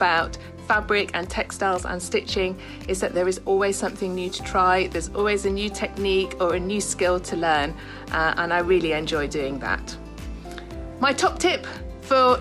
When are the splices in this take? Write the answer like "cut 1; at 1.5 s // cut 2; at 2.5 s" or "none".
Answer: none